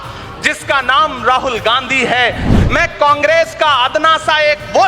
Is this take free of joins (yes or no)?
no